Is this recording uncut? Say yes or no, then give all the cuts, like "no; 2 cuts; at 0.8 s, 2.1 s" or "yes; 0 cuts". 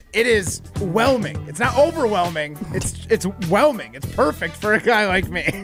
yes; 0 cuts